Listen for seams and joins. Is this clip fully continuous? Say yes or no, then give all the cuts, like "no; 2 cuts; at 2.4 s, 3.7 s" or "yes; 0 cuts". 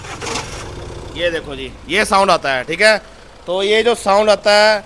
yes; 0 cuts